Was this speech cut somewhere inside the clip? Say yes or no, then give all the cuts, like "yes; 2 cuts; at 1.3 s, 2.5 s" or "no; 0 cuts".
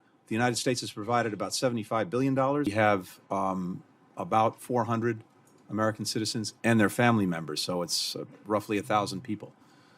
yes; 1 cut; at 2.7 s